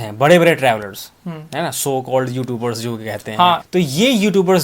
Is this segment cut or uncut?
cut